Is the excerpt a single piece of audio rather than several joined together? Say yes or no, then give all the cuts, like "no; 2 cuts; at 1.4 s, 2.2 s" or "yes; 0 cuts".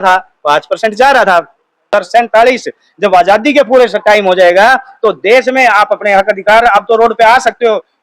no; 1 cut; at 1.9 s